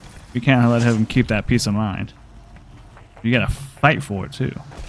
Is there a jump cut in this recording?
no; 0 cuts

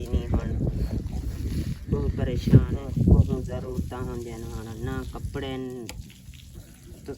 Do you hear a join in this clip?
yes; 1 cut; at 2.8 s

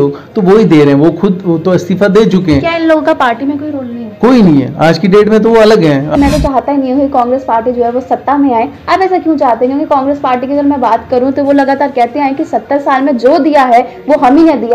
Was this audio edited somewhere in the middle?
yes; 1 cut; at 6.1 s

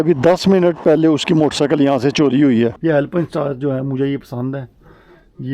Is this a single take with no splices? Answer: no; 1 cut; at 2.8 s

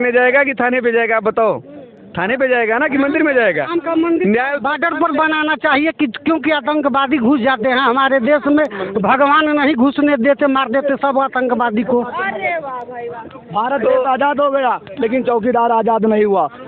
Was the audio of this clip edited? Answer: no; 0 cuts

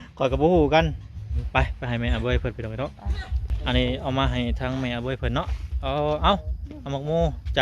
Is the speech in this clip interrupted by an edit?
yes; 1 cut; at 1.3 s

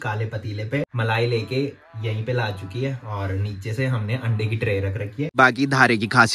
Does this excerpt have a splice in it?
yes; 2 cuts; at 0.9 s, 5.3 s

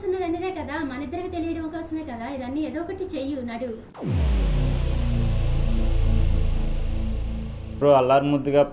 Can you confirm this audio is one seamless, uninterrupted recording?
no; 1 cut; at 7.8 s

